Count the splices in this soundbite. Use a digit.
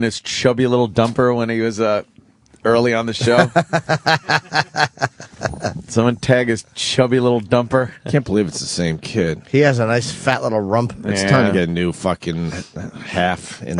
0